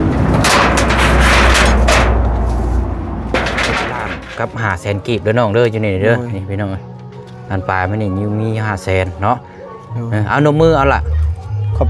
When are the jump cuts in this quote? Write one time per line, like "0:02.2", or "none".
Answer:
0:04.1